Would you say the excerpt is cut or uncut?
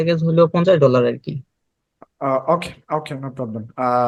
uncut